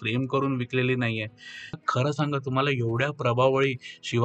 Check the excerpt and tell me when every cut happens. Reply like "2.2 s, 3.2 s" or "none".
1.8 s